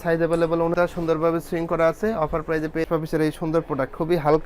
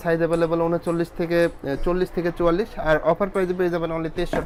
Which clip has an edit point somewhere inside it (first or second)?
first